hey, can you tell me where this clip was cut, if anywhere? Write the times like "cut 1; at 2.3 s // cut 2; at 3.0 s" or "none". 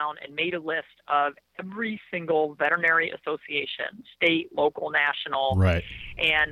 none